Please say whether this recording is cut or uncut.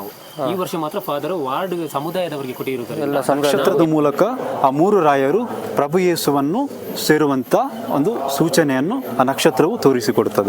cut